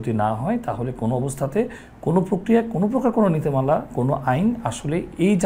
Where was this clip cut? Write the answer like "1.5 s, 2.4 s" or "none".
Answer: none

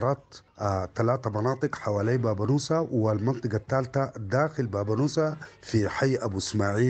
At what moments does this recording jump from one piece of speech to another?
none

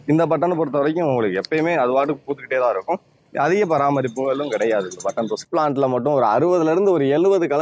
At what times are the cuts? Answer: 5.5 s

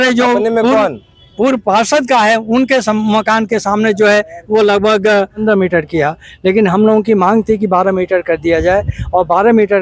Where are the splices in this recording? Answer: 5.4 s

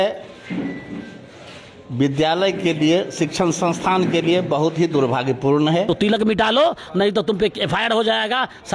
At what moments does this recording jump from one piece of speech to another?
5.9 s

